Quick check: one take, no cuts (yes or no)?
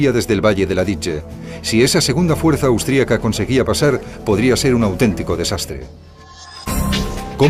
no